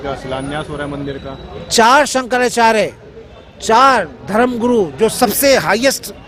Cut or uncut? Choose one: uncut